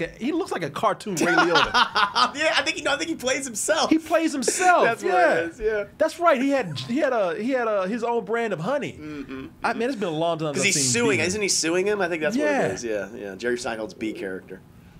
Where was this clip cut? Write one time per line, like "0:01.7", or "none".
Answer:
none